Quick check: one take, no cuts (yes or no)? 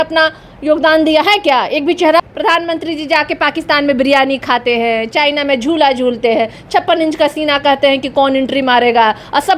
no